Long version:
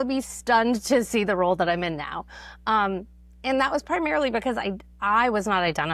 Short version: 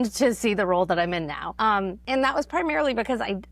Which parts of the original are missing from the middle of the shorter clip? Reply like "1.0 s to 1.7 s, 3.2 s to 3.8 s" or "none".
2.5 s to 3.1 s